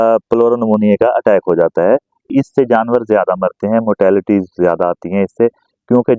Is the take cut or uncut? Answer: cut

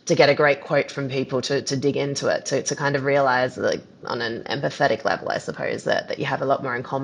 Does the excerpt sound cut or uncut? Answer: uncut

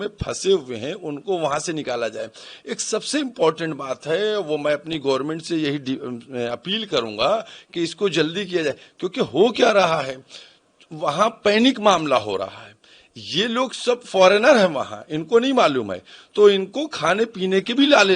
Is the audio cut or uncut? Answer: uncut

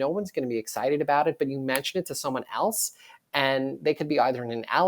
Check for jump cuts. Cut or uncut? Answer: uncut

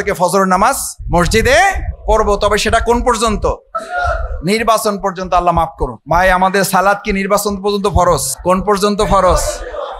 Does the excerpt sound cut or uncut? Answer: cut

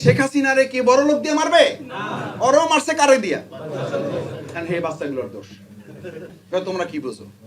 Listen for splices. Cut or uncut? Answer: cut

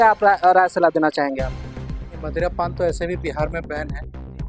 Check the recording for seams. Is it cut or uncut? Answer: uncut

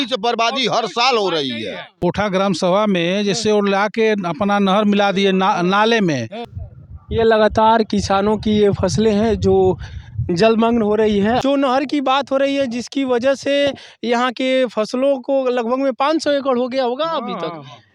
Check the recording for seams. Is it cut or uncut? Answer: cut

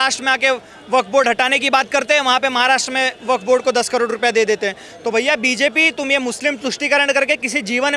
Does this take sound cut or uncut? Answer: uncut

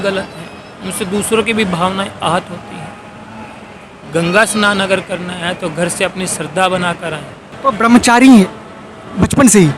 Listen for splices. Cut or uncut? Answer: cut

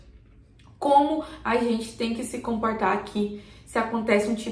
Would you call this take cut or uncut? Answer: uncut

